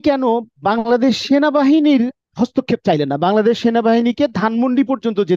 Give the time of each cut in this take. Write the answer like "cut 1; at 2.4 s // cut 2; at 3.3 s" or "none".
cut 1; at 2.2 s